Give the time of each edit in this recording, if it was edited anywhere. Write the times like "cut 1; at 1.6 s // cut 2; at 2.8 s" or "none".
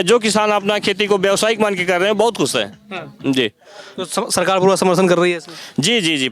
none

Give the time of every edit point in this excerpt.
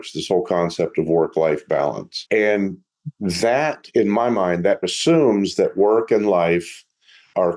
cut 1; at 2.1 s // cut 2; at 4.9 s

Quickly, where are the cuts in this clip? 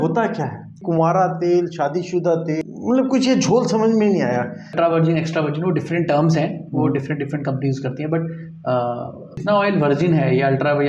cut 1; at 0.8 s // cut 2; at 4.8 s // cut 3; at 9.4 s

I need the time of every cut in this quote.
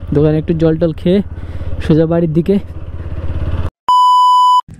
cut 1; at 3.9 s

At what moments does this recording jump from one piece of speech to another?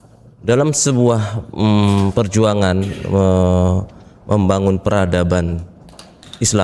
none

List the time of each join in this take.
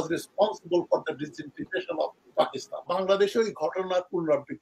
cut 1; at 2.9 s

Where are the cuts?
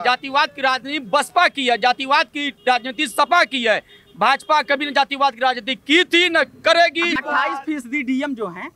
cut 1; at 7.2 s

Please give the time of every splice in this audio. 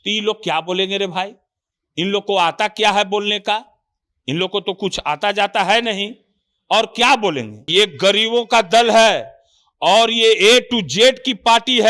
cut 1; at 7.5 s

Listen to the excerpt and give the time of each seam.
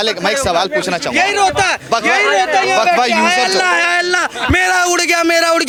none

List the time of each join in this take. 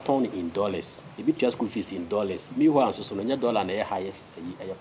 none

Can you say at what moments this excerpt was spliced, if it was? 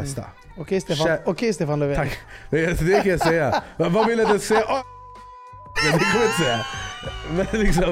none

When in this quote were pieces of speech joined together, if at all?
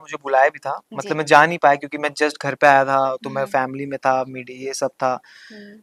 none

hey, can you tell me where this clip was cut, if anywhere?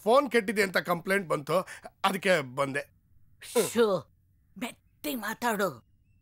none

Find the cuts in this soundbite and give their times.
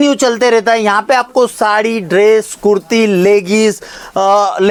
none

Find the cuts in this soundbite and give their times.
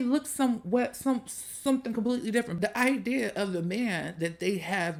none

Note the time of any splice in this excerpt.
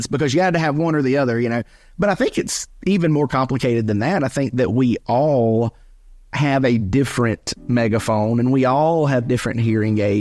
cut 1; at 2.6 s

